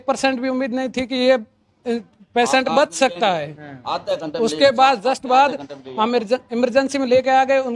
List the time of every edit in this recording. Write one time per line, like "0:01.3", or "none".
none